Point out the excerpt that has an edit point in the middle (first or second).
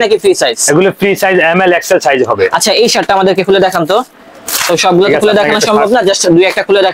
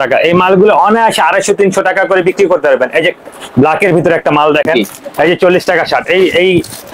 second